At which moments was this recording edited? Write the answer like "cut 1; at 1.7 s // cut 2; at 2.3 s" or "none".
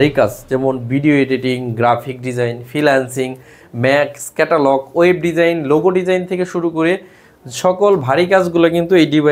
none